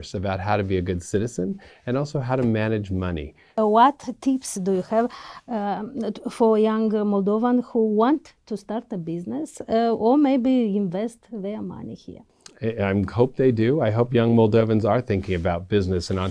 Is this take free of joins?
no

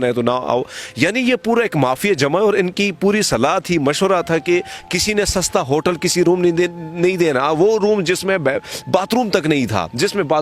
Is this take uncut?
yes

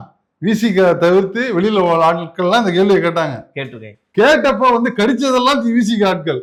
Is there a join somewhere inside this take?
no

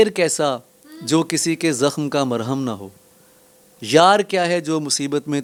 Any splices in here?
no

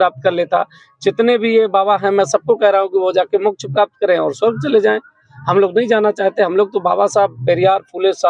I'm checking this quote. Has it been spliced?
no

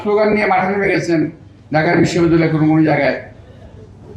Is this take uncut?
yes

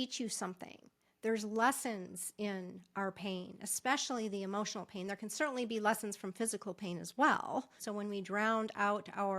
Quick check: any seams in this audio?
yes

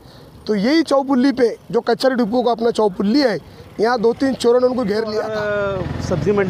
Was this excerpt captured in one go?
no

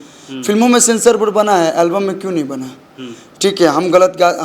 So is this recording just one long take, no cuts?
yes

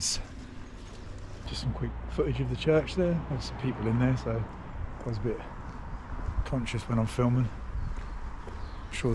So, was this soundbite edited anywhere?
yes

